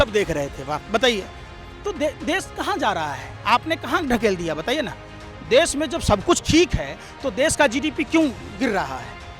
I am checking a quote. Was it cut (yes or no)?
no